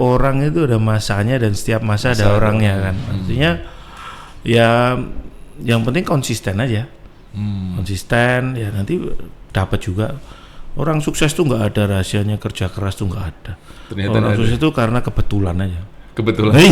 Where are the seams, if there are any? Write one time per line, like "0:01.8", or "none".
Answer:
none